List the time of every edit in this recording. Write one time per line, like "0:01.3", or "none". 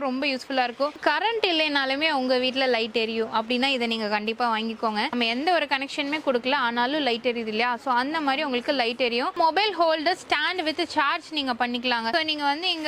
0:01.0
0:05.1
0:09.3
0:12.1